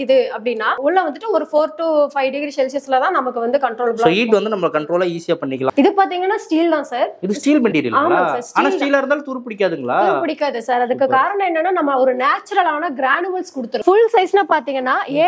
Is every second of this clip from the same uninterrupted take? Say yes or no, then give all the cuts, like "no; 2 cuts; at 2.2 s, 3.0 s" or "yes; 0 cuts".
no; 3 cuts; at 0.8 s, 5.7 s, 13.8 s